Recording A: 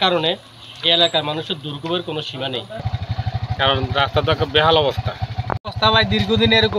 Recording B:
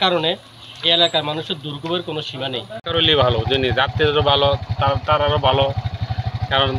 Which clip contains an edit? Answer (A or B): A